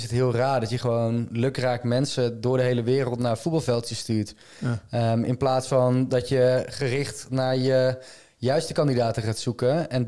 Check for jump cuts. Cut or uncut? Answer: uncut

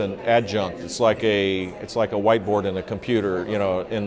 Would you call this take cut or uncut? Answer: uncut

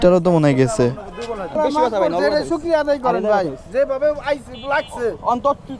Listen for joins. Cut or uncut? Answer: cut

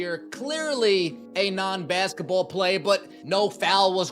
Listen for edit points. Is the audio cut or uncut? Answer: cut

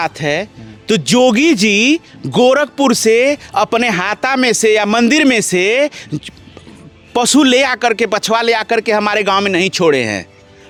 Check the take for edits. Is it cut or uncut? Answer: uncut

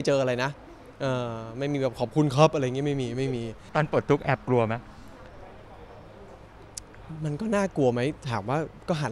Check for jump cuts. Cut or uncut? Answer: cut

